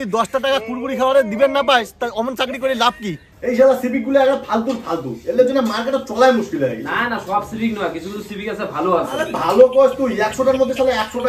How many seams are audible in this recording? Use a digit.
1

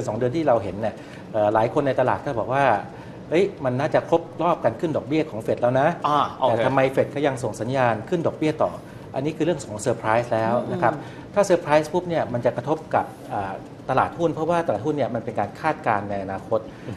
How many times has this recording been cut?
0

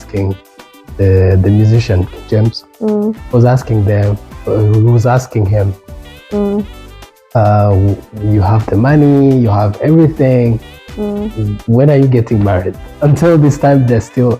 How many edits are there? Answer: 0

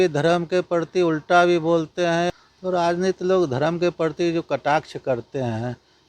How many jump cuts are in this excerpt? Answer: 1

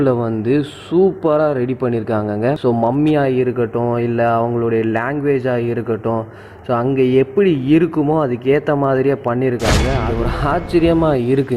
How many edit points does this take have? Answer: 1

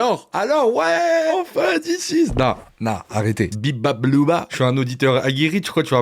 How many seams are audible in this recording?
3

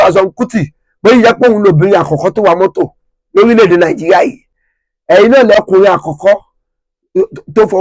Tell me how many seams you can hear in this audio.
1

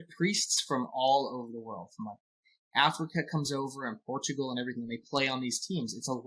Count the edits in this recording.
0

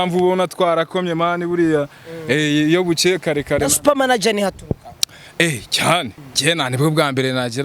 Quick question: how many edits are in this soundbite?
1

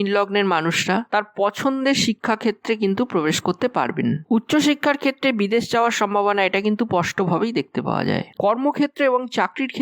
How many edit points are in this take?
1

